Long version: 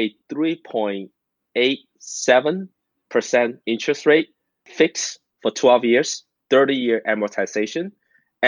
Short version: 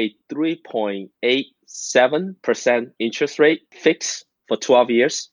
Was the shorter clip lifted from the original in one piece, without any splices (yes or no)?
no